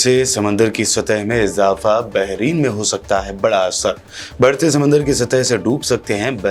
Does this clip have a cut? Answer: no; 0 cuts

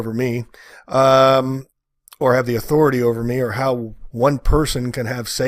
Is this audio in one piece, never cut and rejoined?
yes; 0 cuts

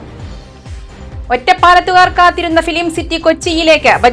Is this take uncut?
no; 1 cut; at 1.2 s

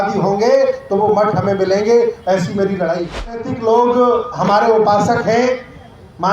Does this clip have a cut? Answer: yes; 1 cut; at 3.5 s

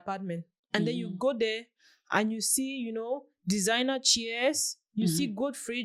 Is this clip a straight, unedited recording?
yes; 0 cuts

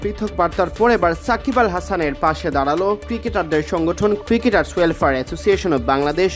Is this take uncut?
yes; 0 cuts

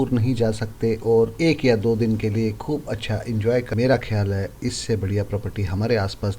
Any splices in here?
yes; 1 cut; at 3.9 s

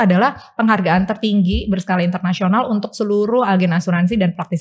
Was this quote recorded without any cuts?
yes; 0 cuts

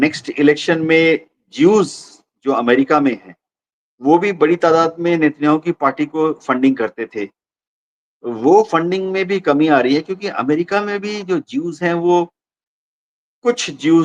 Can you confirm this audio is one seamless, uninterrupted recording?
yes; 0 cuts

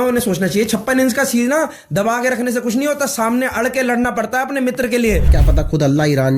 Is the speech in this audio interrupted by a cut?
yes; 1 cut; at 5.4 s

